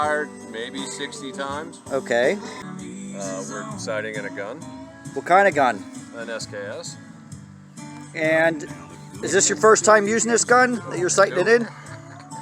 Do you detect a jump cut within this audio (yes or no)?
yes